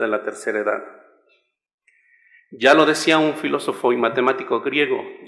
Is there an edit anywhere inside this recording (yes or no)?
no